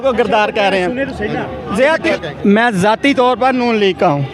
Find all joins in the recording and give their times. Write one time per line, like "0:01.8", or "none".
0:02.1